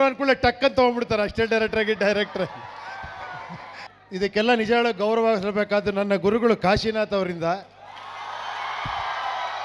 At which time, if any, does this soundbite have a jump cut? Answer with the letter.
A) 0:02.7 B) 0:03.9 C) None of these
B